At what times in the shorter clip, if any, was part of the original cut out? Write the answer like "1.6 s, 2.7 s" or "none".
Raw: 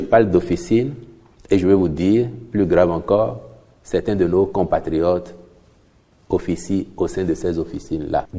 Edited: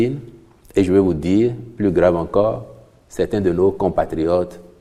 none